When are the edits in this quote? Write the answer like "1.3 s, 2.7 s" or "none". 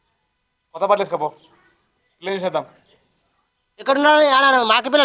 none